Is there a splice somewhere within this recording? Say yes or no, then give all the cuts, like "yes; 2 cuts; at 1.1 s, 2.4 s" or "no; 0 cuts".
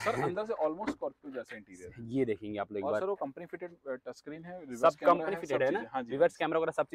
no; 0 cuts